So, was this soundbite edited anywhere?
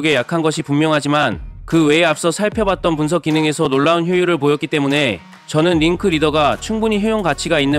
no; 0 cuts

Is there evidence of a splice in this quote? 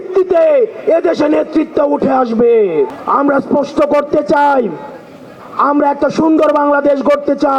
no; 0 cuts

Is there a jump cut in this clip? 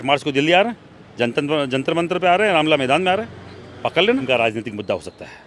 yes; 1 cut; at 4.2 s

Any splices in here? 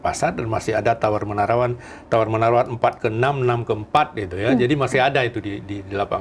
no; 0 cuts

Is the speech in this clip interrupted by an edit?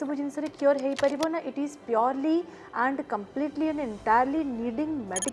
no; 0 cuts

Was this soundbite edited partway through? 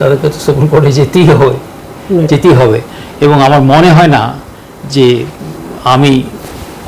no; 0 cuts

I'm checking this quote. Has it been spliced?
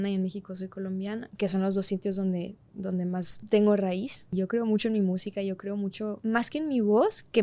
yes; 4 cuts; at 1.3 s, 3.4 s, 4.3 s, 6.2 s

